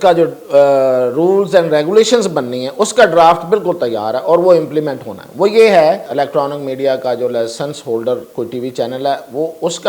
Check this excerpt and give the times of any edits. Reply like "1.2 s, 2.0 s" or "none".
6.1 s